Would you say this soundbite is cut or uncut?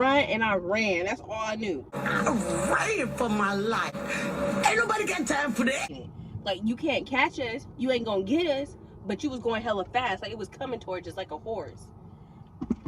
cut